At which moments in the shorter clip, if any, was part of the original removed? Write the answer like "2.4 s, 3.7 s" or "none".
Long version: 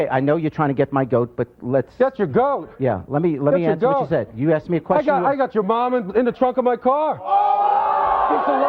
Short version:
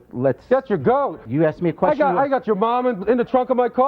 1.2 s